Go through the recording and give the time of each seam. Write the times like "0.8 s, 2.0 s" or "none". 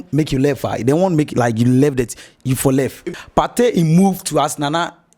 3.0 s